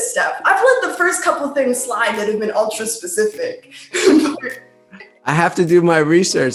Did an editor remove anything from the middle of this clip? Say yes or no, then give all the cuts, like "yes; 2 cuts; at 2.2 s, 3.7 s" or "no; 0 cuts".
no; 0 cuts